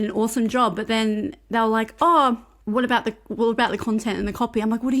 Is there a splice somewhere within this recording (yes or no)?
yes